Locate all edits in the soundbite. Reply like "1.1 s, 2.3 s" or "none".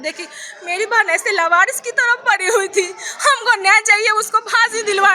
none